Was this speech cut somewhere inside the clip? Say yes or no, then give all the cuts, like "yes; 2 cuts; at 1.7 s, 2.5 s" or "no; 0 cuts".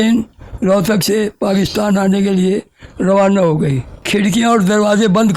yes; 1 cut; at 3.9 s